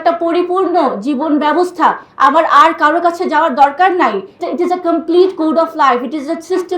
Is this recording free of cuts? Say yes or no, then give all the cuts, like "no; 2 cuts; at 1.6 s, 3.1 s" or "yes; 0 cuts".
no; 1 cut; at 4.4 s